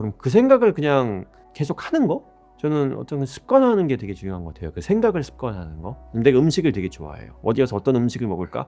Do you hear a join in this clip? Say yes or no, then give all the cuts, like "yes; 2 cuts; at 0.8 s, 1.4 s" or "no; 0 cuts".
no; 0 cuts